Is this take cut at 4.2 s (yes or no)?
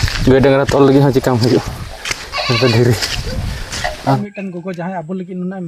yes